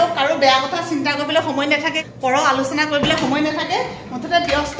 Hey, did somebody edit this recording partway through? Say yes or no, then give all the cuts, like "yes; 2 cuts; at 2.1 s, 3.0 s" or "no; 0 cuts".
yes; 1 cut; at 2.0 s